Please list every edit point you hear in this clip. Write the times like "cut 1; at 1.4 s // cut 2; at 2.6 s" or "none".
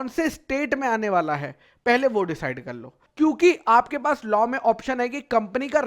cut 1; at 3.0 s